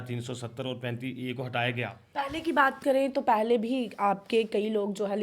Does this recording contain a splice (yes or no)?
yes